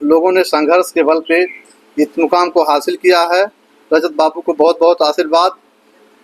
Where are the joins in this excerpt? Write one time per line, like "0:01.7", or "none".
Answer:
none